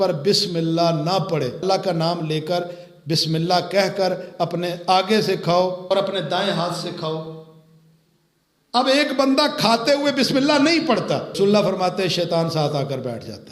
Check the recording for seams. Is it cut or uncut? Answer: cut